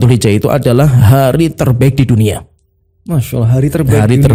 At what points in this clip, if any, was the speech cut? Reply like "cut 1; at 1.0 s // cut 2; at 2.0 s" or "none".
none